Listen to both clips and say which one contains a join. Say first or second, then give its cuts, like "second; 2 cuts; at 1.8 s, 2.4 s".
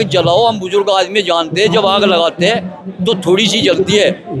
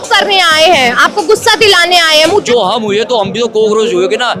second; 1 cut; at 2.5 s